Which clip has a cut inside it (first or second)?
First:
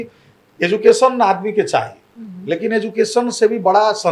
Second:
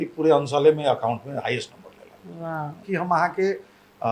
second